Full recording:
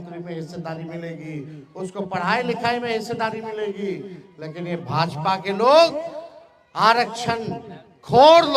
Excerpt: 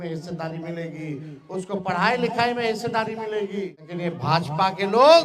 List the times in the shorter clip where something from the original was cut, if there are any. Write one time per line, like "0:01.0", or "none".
0:03.8